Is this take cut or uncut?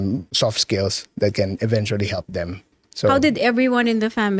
cut